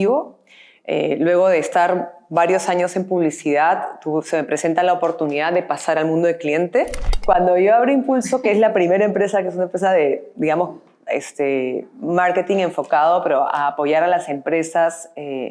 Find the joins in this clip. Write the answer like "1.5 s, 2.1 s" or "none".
7.1 s